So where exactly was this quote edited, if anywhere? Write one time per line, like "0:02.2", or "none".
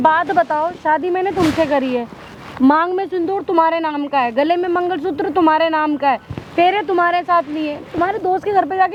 none